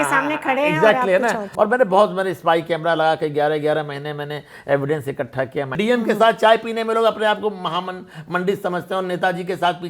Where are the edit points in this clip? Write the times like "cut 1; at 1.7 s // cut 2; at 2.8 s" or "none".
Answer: cut 1; at 1.5 s // cut 2; at 5.7 s